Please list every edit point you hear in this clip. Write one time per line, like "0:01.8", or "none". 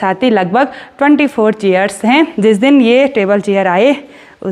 0:02.3